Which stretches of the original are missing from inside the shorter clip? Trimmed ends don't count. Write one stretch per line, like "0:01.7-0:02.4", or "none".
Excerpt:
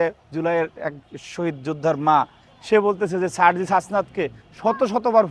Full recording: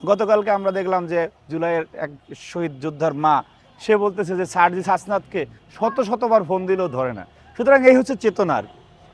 none